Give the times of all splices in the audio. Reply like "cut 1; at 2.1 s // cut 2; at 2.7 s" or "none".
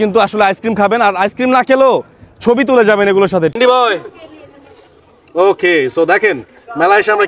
cut 1; at 3.5 s